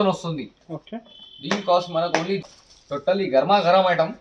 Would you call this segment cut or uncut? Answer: cut